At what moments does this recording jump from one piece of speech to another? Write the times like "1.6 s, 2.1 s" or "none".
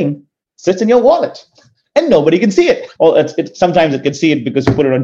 2.9 s